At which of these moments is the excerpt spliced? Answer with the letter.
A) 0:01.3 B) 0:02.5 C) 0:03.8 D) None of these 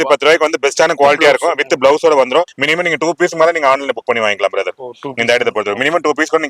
B